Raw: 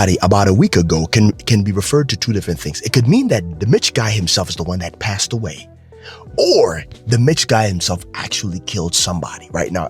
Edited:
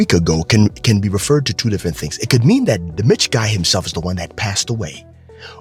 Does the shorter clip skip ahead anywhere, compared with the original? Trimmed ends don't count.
no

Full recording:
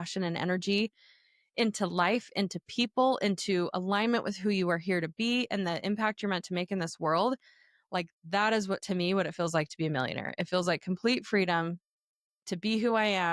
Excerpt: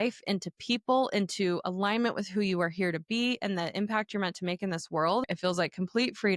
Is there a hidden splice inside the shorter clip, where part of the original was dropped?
yes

